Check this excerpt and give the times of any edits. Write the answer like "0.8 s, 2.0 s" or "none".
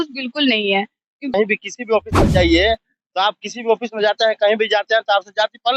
1.3 s